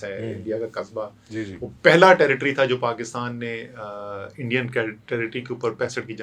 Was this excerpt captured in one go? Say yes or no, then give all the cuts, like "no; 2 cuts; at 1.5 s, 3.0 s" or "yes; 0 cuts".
yes; 0 cuts